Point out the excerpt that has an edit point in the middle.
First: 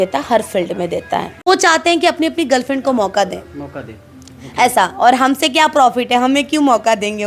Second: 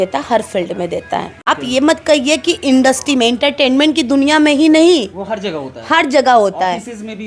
first; 1 cut; at 1.4 s

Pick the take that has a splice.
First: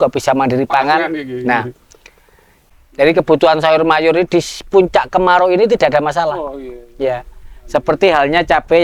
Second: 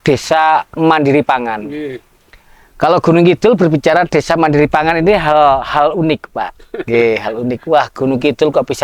first; 1 cut; at 2.7 s

